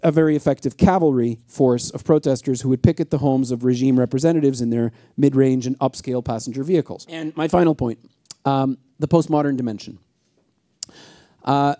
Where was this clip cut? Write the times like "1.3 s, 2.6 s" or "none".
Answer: 7.0 s